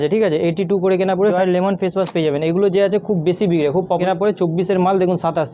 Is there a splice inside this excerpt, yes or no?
yes